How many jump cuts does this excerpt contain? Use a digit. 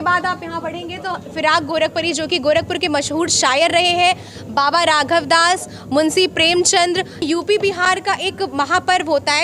1